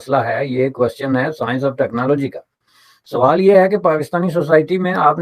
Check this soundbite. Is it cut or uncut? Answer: uncut